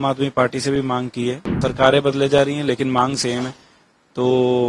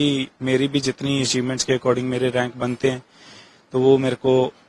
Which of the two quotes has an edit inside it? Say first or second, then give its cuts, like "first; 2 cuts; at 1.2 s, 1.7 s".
first; 1 cut; at 1.5 s